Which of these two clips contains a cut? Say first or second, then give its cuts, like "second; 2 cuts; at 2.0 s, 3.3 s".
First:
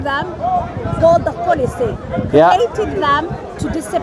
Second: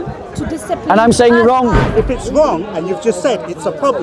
second; 1 cut; at 1.8 s